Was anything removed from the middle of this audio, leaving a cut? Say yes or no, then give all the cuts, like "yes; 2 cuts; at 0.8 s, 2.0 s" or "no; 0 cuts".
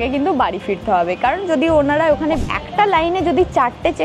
yes; 1 cut; at 2.4 s